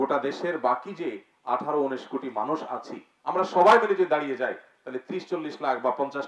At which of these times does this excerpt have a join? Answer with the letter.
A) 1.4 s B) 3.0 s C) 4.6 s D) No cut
D